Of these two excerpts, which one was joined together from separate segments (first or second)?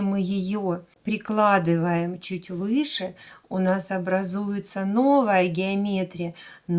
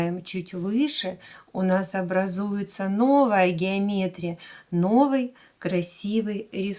first